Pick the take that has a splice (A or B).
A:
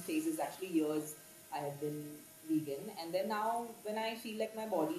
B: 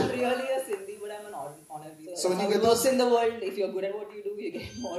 B